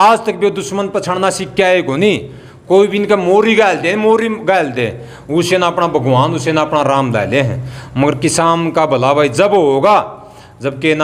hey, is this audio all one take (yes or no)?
yes